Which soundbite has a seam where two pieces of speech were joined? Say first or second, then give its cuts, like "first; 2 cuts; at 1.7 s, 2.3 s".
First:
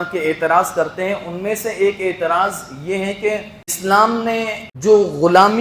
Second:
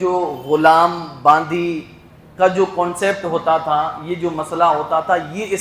first; 2 cuts; at 3.8 s, 4.6 s